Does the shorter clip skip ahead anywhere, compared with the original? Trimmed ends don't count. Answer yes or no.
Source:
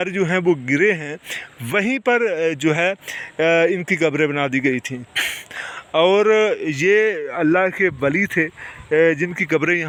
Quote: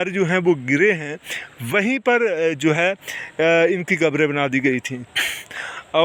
no